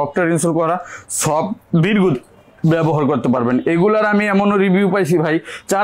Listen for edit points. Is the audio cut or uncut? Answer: uncut